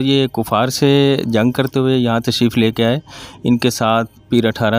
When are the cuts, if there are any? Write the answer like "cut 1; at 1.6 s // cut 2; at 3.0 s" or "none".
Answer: none